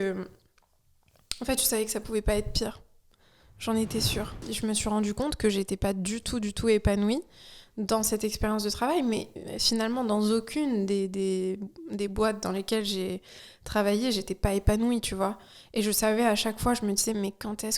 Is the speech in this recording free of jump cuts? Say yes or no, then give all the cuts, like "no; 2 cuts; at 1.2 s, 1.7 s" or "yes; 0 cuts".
no; 1 cut; at 4.4 s